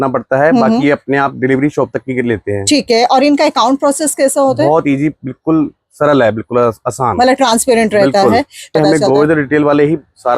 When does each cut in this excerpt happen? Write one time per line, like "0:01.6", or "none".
0:08.7